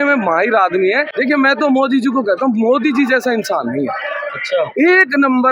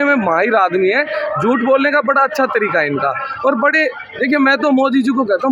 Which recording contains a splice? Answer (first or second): first